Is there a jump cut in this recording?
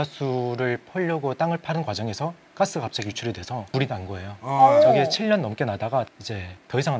no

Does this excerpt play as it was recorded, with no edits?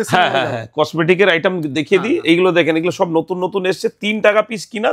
yes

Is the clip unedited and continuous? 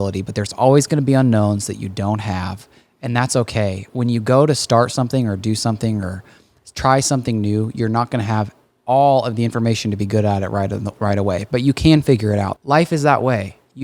no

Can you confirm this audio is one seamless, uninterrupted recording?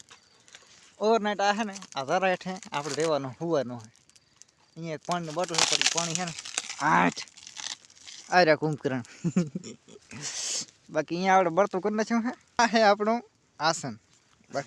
yes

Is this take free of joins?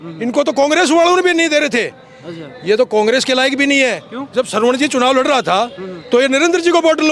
yes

